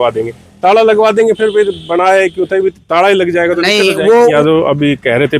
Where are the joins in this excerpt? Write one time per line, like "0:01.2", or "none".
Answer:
0:04.3